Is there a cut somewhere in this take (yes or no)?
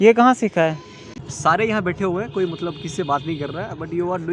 yes